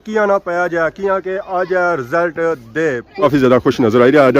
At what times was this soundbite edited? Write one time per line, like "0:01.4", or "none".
0:03.2